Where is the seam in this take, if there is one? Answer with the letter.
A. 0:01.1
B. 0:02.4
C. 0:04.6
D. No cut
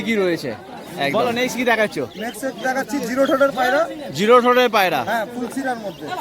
A